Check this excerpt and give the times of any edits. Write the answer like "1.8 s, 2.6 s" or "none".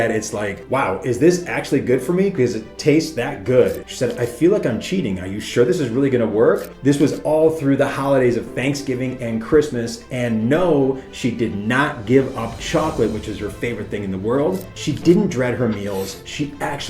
3.8 s, 6.7 s, 14.7 s

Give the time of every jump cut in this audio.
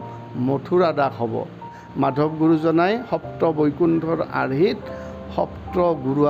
1.8 s

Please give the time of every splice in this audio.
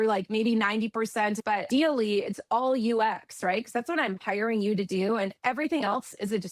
1.4 s

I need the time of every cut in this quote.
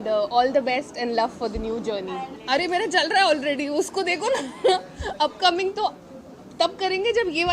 2.3 s

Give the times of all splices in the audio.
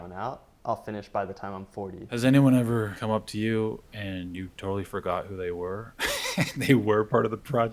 2.0 s, 2.9 s

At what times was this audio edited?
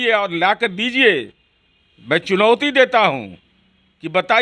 none

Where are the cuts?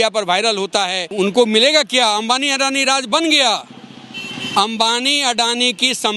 1.1 s

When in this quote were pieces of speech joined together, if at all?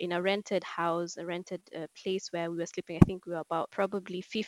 none

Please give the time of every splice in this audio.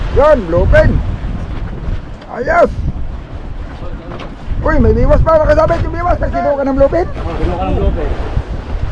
6.3 s

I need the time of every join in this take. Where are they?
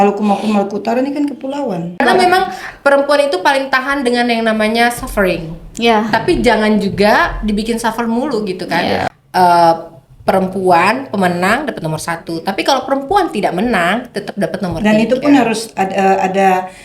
2.0 s, 9.2 s

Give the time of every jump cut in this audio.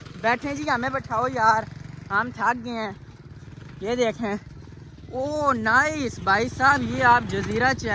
none

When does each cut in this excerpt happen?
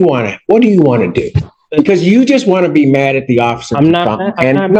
none

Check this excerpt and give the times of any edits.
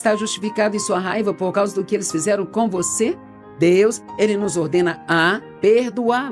none

